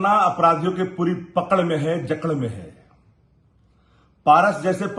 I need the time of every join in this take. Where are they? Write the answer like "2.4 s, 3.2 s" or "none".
none